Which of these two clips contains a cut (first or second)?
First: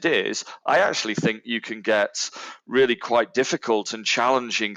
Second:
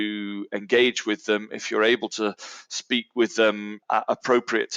second